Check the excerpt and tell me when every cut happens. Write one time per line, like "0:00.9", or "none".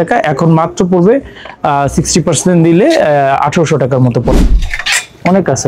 0:04.3